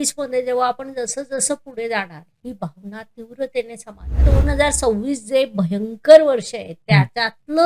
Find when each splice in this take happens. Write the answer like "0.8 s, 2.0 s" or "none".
4.2 s